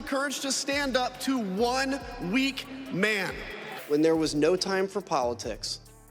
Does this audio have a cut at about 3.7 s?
yes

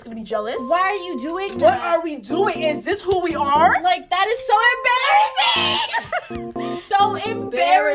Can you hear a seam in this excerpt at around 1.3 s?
no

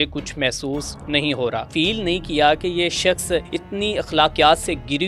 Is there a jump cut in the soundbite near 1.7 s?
yes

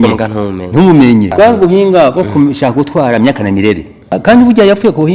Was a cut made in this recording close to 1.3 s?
yes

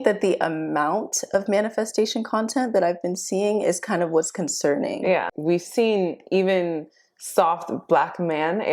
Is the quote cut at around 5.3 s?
yes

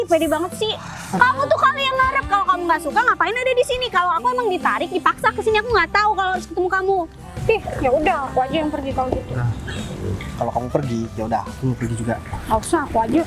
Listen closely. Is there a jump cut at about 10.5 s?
no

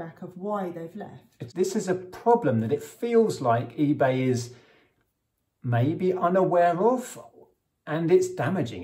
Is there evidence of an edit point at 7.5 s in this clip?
no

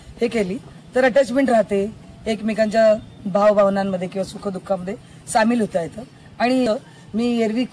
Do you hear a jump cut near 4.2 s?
no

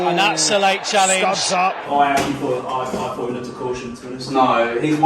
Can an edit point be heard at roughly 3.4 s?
no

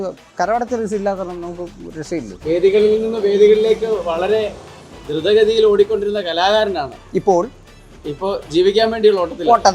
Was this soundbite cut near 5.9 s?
no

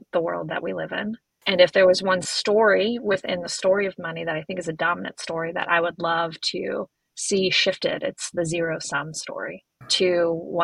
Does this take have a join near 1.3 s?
yes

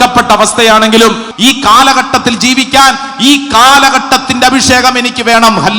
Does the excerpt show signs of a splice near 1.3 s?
yes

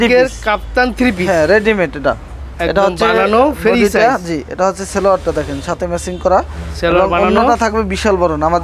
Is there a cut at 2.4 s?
no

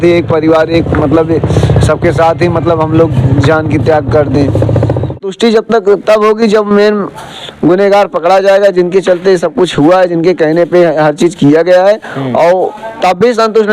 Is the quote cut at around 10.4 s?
no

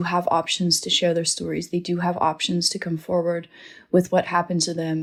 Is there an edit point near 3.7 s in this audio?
no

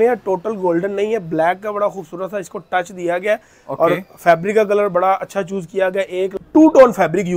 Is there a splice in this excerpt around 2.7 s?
no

